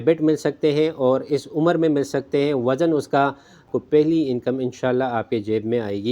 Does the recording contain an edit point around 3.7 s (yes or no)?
yes